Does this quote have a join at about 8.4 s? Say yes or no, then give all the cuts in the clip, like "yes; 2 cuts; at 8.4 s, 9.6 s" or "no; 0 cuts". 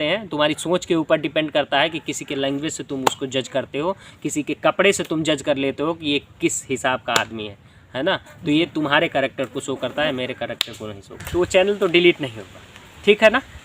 no; 1 cut; at 11.2 s